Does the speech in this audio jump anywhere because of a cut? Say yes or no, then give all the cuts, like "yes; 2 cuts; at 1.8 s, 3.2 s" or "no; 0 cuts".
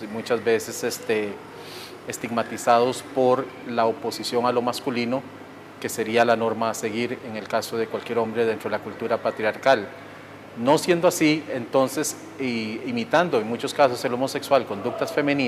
no; 0 cuts